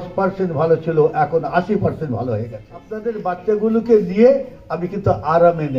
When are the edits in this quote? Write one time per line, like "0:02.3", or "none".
0:03.1